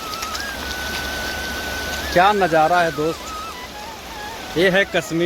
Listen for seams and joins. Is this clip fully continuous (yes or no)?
yes